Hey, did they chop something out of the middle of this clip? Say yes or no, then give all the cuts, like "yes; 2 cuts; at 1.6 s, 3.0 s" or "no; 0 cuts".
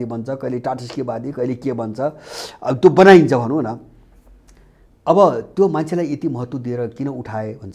no; 0 cuts